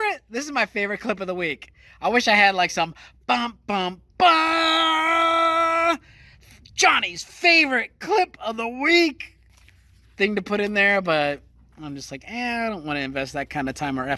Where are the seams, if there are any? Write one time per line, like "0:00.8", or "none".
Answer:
none